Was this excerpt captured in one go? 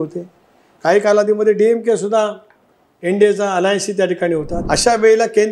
no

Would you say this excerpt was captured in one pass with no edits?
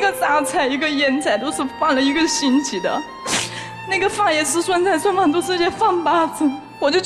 yes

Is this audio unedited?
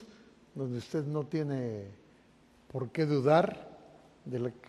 yes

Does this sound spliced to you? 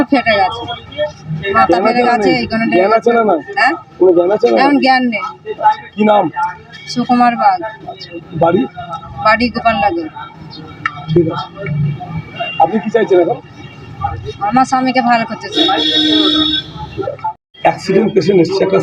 no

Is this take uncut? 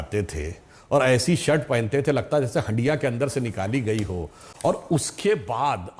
yes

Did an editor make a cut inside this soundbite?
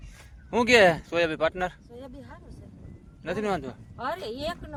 no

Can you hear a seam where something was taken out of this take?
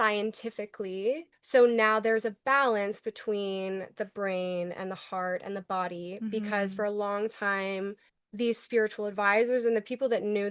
yes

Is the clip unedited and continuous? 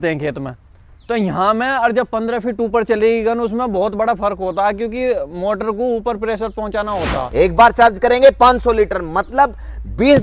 no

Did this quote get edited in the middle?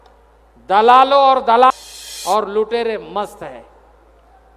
yes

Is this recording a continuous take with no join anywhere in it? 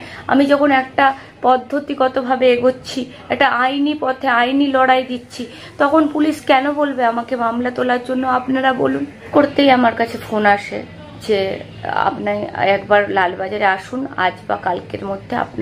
no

